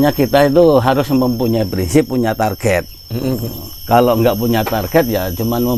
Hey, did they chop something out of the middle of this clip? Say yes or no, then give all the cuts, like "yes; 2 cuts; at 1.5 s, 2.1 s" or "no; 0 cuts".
no; 0 cuts